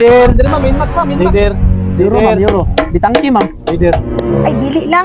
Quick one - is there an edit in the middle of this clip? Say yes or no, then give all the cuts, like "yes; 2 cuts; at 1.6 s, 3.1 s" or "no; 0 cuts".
no; 0 cuts